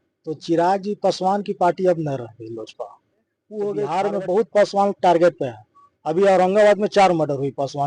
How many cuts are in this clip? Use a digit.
1